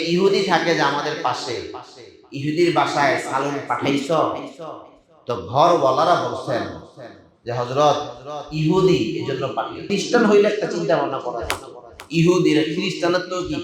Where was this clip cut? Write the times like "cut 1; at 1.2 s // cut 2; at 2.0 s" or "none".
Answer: cut 1; at 9.9 s